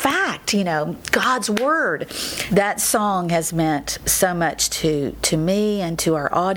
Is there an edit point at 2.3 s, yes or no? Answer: yes